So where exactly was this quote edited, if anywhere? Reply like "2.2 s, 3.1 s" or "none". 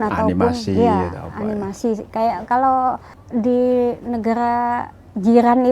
3.1 s